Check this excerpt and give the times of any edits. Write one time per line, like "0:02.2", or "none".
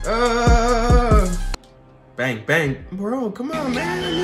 0:01.5